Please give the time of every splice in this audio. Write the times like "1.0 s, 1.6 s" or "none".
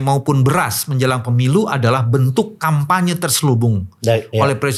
none

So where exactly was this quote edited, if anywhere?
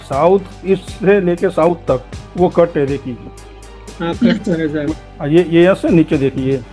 2.2 s, 4.9 s

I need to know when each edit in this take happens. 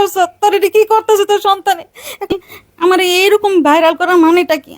2.3 s

